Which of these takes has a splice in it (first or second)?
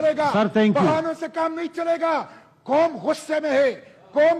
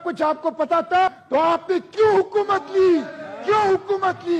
second